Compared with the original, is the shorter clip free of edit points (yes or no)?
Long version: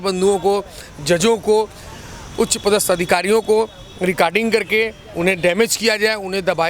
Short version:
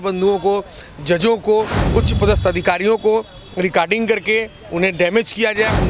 no